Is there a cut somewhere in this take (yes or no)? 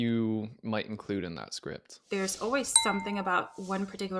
yes